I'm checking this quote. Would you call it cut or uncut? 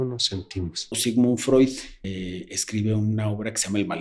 cut